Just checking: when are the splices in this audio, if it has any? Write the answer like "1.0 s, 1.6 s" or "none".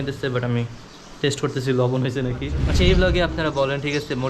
2.6 s

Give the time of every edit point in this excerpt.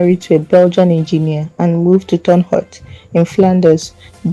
3.4 s

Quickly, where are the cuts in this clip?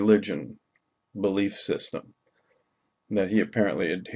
3.2 s

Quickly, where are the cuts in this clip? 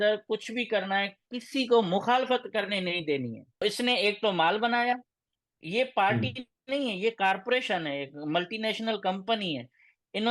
3.6 s

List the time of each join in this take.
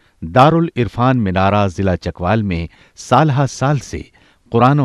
3.5 s

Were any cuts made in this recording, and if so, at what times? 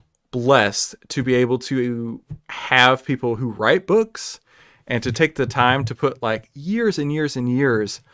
none

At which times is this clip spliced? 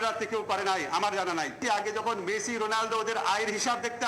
1.6 s

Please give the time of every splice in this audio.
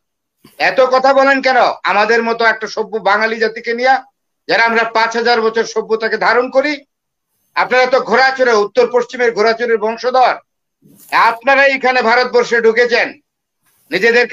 none

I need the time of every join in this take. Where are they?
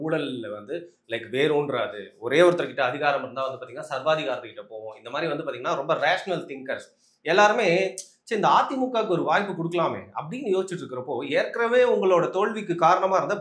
none

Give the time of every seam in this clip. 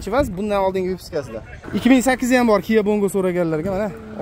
1.6 s

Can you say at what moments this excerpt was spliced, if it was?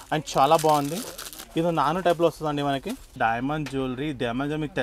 3.0 s

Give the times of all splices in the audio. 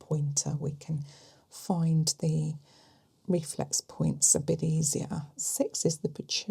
5.5 s

